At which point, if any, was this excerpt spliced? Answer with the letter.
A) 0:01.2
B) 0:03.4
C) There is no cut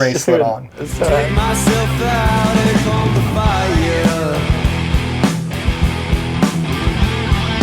A